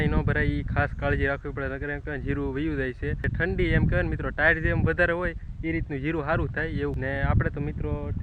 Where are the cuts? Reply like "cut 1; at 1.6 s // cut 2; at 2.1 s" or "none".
cut 1; at 3.3 s // cut 2; at 7.0 s